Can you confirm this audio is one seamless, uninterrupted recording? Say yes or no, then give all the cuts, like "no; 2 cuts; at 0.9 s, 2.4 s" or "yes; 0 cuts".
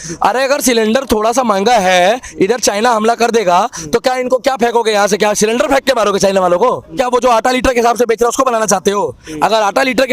no; 1 cut; at 7.0 s